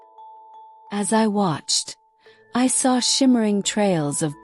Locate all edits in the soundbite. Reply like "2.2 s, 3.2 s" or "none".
0.9 s